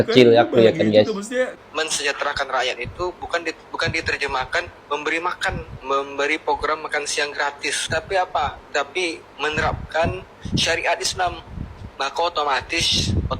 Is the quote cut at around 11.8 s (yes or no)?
no